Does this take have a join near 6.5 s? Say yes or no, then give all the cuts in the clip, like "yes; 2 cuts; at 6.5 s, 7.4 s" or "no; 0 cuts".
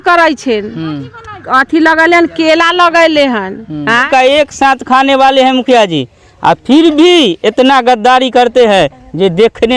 no; 1 cut; at 4.1 s